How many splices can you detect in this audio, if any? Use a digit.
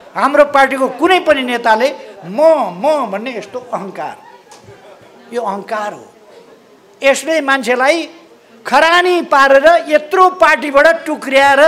0